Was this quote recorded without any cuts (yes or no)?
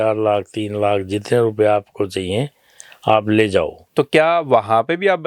no